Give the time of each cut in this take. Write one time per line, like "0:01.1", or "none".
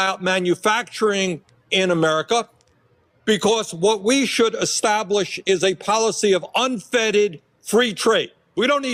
none